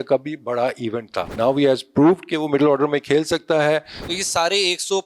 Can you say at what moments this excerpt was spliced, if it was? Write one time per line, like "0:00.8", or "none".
0:01.3
0:04.0

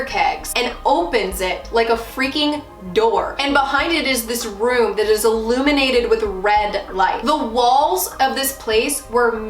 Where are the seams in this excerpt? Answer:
0:07.2

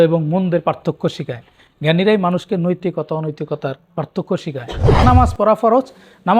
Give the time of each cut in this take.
0:05.0

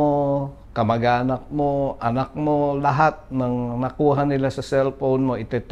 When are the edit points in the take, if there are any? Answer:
none

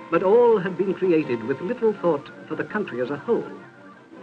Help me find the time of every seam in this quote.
none

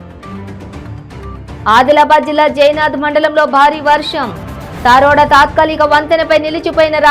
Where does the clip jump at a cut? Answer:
0:01.0

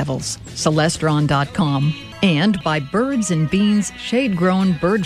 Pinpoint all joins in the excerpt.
0:02.0

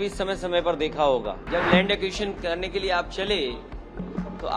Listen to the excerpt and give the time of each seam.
0:01.4

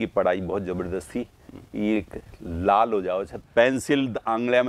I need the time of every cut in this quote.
0:03.4

